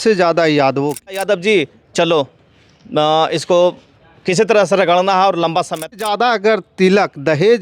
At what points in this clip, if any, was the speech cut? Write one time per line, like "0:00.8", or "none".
0:01.1
0:06.0